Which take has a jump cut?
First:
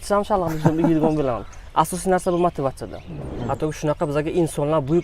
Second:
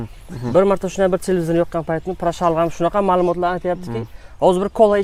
first; 1 cut; at 3.3 s

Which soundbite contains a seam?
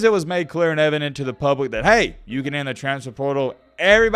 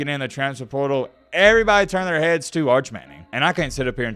second; 1 cut; at 3.1 s

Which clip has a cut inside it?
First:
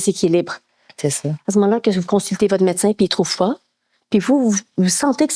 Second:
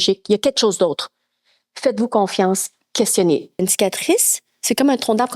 second; 1 cut; at 3.6 s

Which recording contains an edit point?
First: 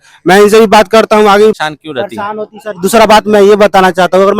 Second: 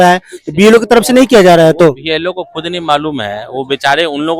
first; 1 cut; at 1.5 s

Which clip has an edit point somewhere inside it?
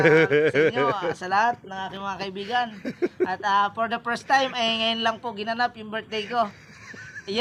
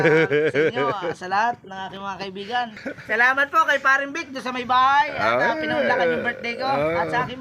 second; 1 cut; at 2.8 s

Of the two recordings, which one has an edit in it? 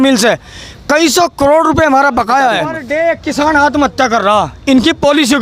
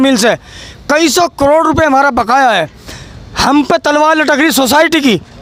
first; 1 cut; at 2.8 s

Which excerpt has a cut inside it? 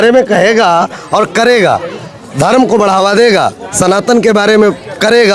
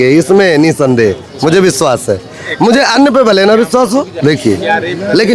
second; 1 cut; at 4.1 s

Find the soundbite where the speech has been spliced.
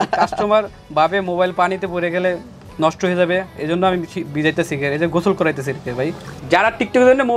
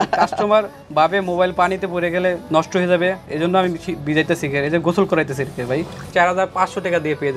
second; 2 cuts; at 2.4 s, 6.0 s

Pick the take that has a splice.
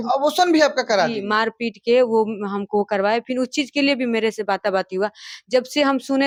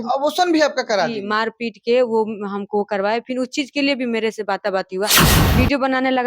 second; 1 cut; at 5.3 s

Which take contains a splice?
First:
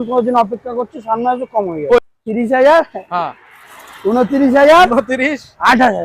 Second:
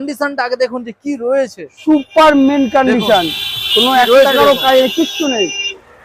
first; 1 cut; at 2.0 s

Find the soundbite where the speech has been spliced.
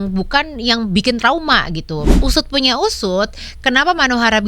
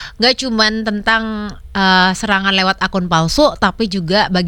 first; 1 cut; at 2.1 s

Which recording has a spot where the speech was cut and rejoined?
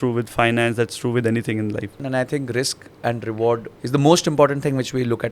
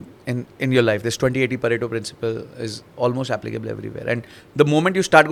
first; 2 cuts; at 2.0 s, 3.7 s

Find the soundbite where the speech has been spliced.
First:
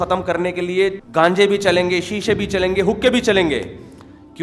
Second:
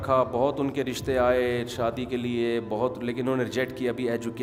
first; 1 cut; at 1.0 s

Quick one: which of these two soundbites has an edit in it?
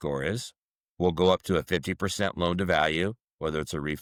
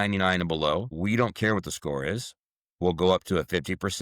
second; 1 cut; at 0.9 s

